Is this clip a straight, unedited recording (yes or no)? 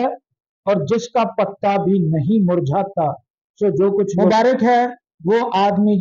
no